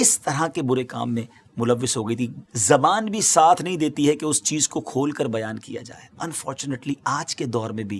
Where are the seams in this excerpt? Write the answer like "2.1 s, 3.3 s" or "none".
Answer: 2.4 s, 6.2 s